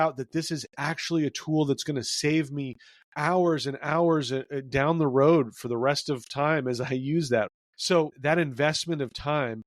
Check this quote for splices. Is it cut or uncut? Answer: uncut